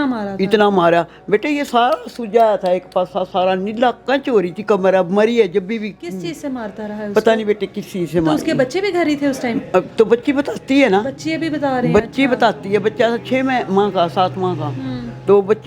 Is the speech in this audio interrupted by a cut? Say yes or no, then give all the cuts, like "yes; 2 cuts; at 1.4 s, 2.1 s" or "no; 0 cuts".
no; 0 cuts